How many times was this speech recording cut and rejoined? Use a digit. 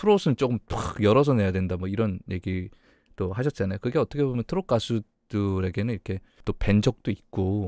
1